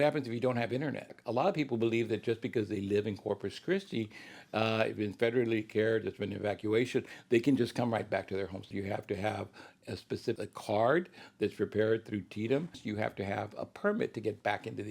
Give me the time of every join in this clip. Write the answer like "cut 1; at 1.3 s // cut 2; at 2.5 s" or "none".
cut 1; at 1.1 s // cut 2; at 8.7 s // cut 3; at 10.4 s // cut 4; at 12.8 s